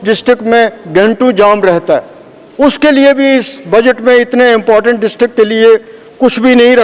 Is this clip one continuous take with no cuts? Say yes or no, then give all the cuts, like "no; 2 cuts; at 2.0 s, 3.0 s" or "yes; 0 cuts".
yes; 0 cuts